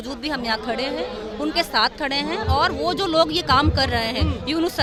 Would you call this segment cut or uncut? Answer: uncut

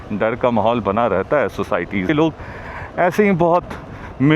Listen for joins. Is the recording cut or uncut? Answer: cut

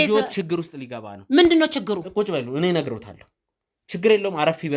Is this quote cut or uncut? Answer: uncut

